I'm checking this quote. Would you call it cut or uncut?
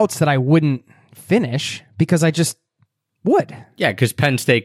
uncut